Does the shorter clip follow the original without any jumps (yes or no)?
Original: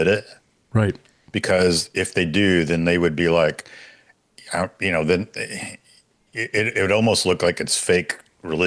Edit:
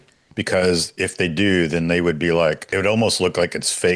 no